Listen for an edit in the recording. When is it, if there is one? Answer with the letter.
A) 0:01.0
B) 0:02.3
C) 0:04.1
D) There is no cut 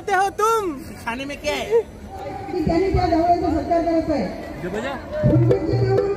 B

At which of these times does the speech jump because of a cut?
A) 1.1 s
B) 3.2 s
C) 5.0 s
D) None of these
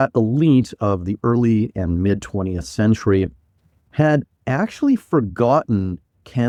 D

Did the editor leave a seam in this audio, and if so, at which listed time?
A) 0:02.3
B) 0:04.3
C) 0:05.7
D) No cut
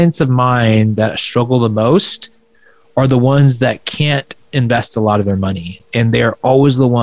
C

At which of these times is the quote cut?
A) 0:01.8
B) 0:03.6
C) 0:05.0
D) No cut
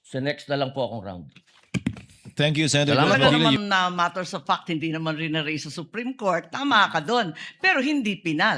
B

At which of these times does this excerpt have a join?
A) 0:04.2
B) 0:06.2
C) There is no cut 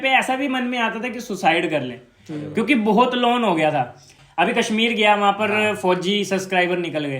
A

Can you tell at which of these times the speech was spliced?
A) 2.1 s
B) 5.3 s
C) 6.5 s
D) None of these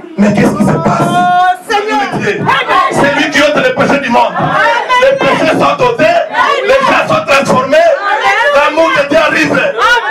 A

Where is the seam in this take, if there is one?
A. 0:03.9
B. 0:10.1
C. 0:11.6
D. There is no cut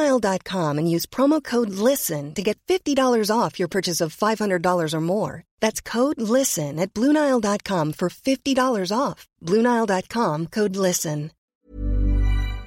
C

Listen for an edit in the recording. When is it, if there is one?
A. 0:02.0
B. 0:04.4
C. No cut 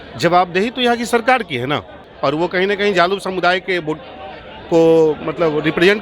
A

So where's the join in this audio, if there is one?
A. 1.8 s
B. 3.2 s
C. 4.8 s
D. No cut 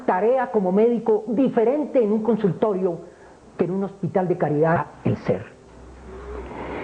D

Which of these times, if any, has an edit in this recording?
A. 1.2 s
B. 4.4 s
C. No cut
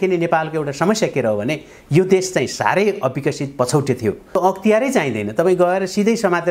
B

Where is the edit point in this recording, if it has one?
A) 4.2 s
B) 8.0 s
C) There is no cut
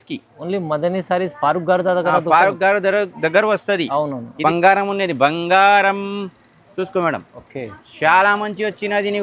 A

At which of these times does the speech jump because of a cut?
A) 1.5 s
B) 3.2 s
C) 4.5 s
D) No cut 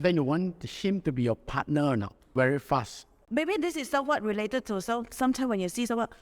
D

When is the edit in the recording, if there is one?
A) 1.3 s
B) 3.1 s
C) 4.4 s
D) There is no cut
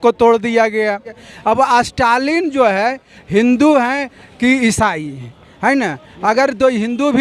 A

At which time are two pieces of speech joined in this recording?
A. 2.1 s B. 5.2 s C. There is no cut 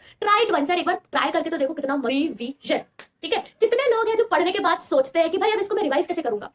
A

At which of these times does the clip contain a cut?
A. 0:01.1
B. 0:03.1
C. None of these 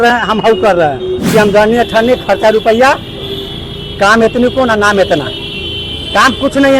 A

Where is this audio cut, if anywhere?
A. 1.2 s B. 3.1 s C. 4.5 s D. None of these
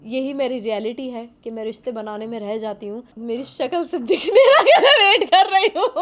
B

